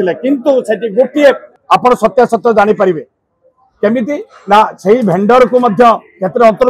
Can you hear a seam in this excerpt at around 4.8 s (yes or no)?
no